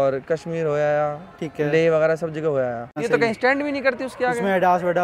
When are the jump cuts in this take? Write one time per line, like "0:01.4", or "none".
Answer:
0:03.0